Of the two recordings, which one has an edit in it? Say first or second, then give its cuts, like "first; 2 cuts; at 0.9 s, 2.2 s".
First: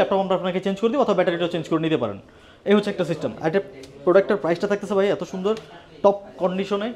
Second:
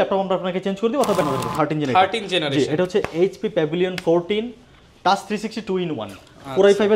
second; 1 cut; at 1.2 s